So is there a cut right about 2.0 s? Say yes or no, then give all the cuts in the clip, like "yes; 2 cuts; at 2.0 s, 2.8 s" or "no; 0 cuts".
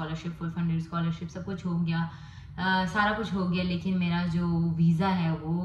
no; 0 cuts